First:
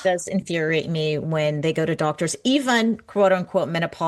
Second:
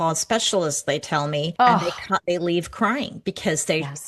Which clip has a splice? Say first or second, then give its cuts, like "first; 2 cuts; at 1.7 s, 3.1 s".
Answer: second; 1 cut; at 1.5 s